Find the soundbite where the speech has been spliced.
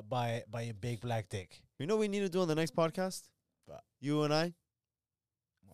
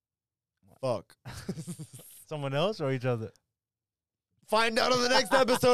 first; 1 cut; at 1.8 s

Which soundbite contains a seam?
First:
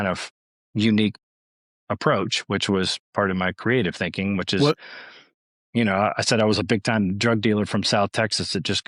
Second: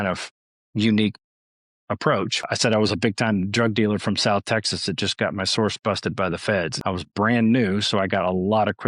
second; 2 cuts; at 2.5 s, 6.7 s

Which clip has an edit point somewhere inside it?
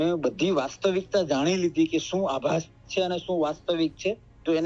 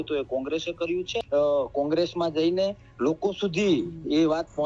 second; 1 cut; at 1.1 s

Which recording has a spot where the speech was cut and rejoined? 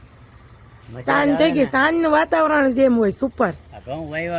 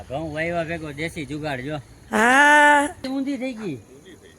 second; 1 cut; at 3.1 s

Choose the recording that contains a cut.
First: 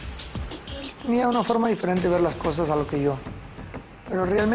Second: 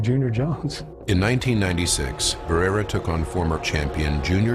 second; 1 cut; at 3.3 s

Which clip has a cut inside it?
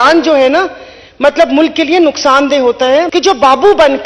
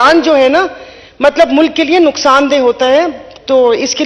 first; 1 cut; at 3.1 s

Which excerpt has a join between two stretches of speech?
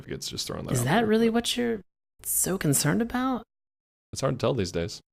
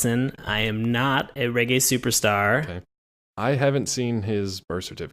second; 1 cut; at 3.7 s

